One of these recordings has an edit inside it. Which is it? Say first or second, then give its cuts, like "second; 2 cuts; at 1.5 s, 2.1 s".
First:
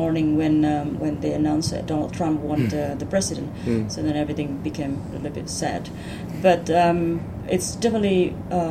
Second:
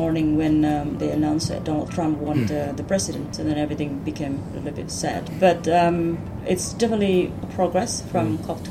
second; 4 cuts; at 1.0 s, 3.3 s, 5.3 s, 7.4 s